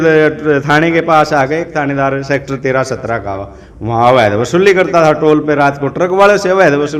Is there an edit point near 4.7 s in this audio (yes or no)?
no